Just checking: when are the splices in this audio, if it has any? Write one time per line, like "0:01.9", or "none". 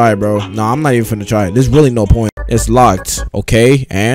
0:02.4